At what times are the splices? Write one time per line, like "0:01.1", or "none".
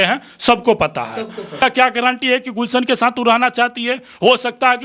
0:01.5